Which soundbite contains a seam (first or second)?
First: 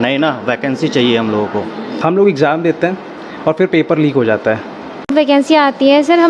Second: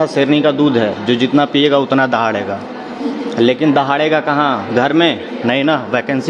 first